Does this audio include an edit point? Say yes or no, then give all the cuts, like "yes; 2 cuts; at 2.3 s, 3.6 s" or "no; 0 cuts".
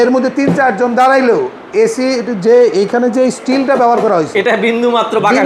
no; 0 cuts